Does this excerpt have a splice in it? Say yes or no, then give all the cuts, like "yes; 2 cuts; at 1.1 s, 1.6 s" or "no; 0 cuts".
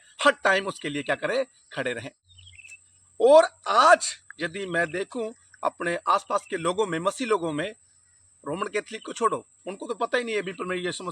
yes; 1 cut; at 2.2 s